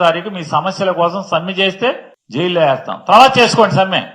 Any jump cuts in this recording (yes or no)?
yes